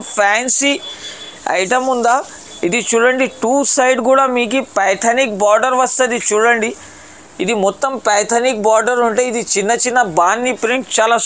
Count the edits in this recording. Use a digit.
0